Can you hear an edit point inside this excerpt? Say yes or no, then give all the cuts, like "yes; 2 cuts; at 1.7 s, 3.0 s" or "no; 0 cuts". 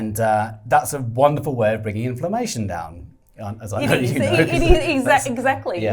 no; 0 cuts